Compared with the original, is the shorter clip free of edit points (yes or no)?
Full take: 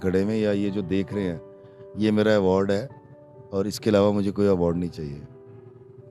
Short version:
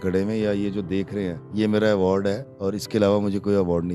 no